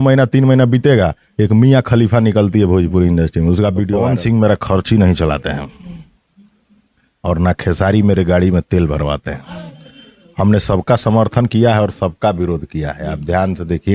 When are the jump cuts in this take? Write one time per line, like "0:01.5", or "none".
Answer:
0:04.0